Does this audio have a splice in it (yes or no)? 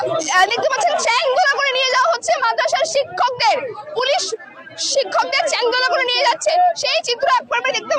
no